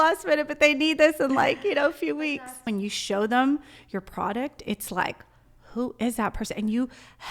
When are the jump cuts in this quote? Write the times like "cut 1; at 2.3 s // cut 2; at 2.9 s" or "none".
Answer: cut 1; at 2.2 s

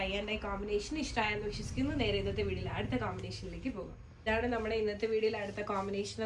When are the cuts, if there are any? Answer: cut 1; at 4.0 s

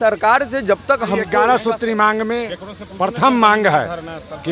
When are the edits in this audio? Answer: cut 1; at 1.3 s

